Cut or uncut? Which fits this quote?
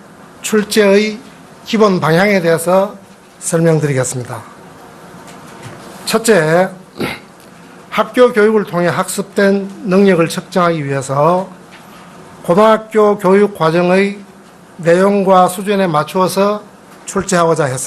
uncut